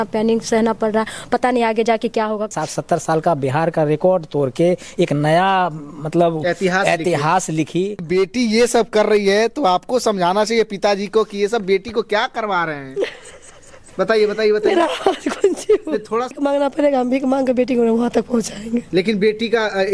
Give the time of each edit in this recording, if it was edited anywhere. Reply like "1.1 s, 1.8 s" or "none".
2.5 s, 8.0 s, 16.4 s